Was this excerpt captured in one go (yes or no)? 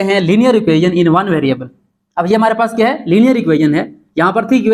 yes